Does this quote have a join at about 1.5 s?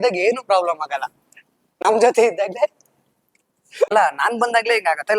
no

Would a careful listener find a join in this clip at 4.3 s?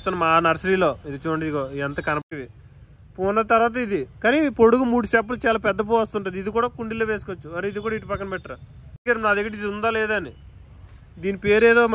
no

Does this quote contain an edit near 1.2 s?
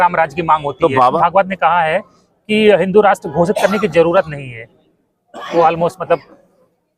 yes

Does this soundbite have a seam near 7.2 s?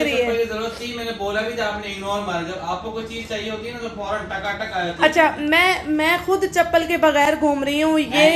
no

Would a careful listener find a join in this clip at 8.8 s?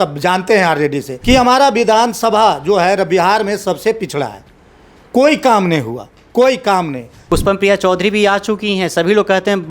no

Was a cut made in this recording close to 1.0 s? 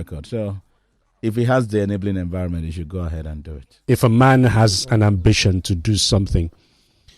no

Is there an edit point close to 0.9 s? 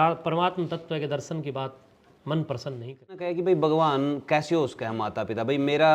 no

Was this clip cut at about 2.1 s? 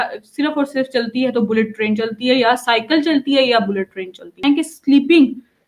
no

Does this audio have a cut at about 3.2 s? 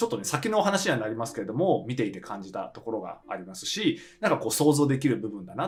no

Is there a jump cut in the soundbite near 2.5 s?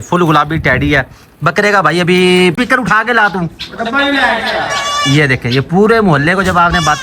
yes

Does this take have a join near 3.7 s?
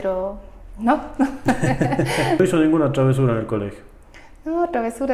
no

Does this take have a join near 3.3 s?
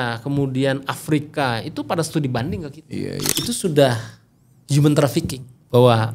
yes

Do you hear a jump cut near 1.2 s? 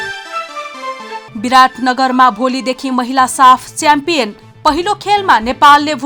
yes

